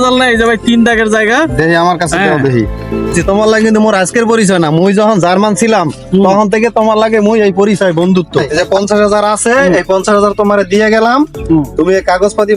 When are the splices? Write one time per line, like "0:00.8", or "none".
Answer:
0:03.2
0:08.5